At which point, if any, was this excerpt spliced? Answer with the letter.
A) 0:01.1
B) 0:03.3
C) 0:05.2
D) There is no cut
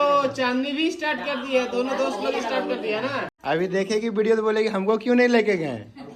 B